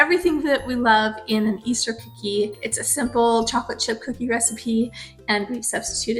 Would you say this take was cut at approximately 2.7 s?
yes; 1 cut; at 2.7 s

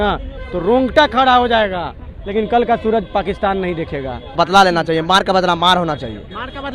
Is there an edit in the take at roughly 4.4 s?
yes; 2 cuts; at 2.1 s, 4.4 s

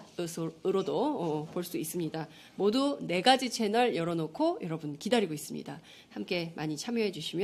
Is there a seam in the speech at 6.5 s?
yes; 1 cut; at 6.5 s

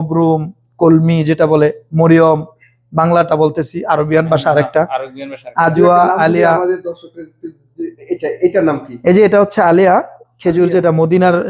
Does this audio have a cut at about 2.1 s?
no; 1 cut; at 8.3 s

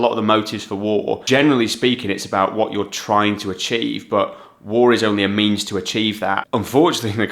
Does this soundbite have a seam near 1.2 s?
yes; 2 cuts; at 1.2 s, 6.4 s

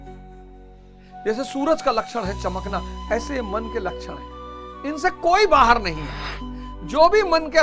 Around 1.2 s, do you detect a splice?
yes; 1 cut; at 1.2 s

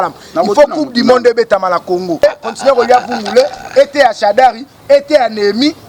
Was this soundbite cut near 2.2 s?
yes; 1 cut; at 2.2 s

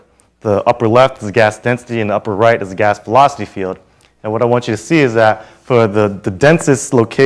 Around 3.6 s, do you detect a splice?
yes; 1 cut; at 3.6 s

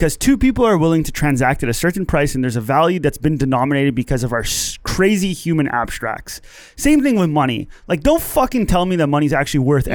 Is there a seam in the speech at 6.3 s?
no; 0 cuts

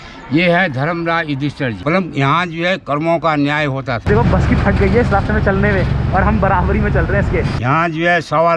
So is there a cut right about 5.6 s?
no; 3 cuts; at 1.8 s, 4.0 s, 7.5 s

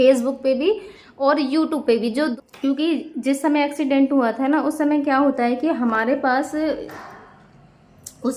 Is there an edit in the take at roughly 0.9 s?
no; 1 cut; at 2.3 s

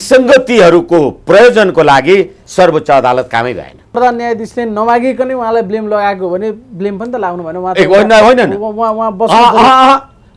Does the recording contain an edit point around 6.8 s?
no; 1 cut; at 4.0 s

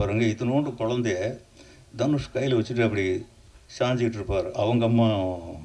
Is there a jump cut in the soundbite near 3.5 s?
no; 0 cuts

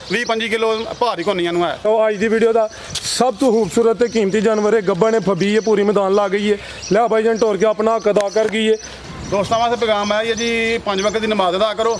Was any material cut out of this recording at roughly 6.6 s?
no; 2 cuts; at 1.9 s, 9.0 s

